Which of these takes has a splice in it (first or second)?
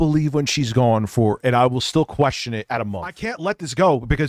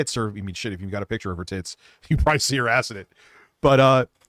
first